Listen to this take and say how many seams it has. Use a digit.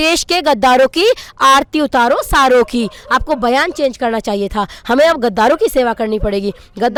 0